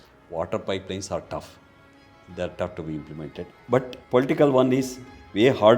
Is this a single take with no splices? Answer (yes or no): yes